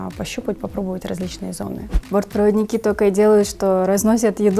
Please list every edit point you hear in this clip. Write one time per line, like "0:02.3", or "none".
0:01.9